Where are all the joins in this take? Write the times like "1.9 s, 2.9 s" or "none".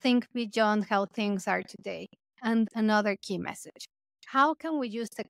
2.5 s

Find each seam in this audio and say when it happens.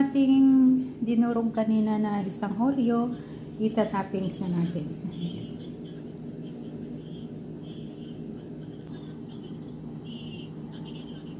8.9 s

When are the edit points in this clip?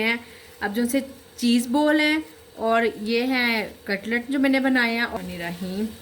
5.1 s

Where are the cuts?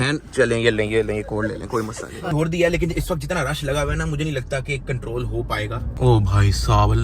2.3 s

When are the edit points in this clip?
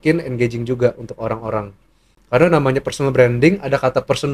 none

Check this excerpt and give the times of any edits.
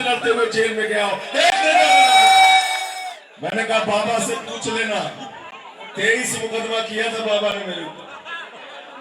2.8 s

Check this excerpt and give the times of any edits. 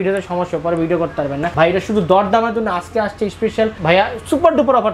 1.5 s, 3.8 s

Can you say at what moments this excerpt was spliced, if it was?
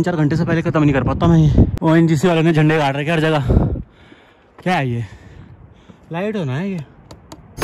none

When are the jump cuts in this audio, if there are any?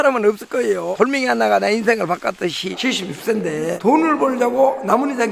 0.9 s, 2.8 s

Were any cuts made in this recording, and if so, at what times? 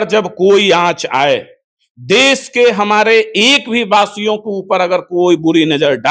none

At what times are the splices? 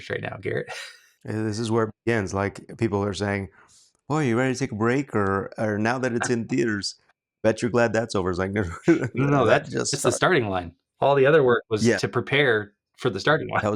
1.2 s

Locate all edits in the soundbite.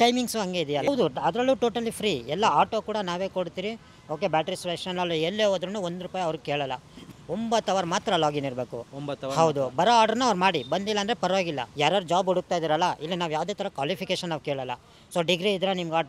0.9 s, 7.0 s, 11.7 s

